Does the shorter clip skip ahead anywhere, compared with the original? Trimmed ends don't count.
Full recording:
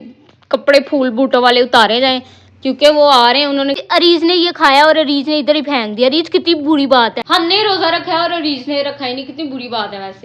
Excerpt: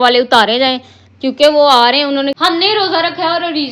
yes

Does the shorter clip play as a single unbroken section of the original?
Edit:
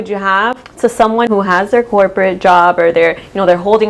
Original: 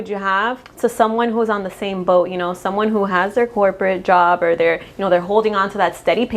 no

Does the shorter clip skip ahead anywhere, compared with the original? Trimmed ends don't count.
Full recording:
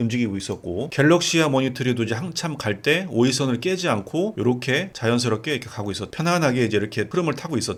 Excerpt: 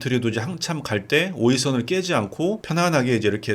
yes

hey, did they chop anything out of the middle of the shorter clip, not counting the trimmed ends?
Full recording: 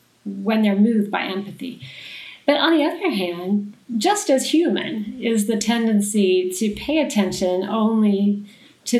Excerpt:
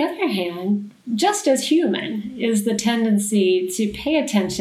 no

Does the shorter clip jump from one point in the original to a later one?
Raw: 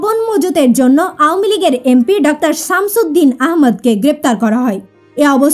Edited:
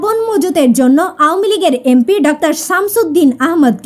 no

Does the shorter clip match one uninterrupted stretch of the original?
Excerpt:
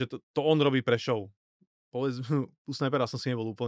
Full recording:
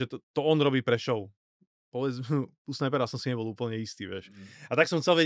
yes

